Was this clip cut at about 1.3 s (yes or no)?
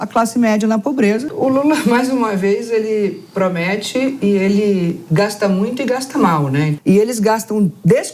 yes